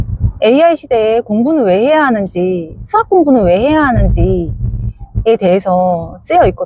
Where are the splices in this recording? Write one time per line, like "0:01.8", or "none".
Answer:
none